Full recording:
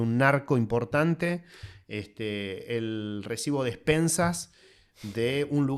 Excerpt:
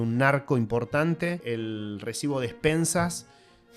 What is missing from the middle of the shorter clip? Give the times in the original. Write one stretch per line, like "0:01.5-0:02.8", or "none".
0:01.4-0:02.6